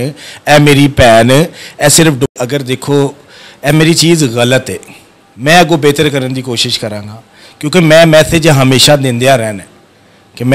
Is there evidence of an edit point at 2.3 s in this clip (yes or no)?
yes